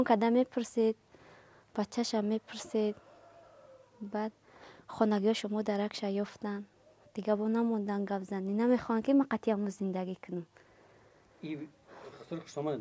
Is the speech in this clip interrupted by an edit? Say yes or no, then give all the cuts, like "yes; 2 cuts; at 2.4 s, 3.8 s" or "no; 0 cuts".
yes; 1 cut; at 6.5 s